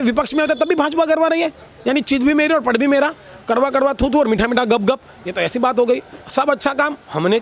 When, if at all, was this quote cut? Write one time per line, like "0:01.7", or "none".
none

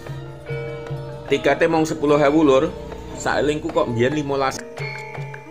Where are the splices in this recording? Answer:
0:04.5

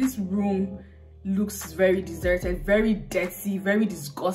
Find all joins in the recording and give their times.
none

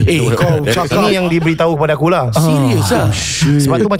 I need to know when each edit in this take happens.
0:01.0

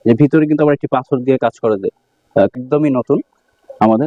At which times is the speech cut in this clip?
0:02.5

